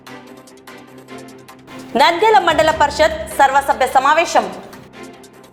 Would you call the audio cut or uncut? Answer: uncut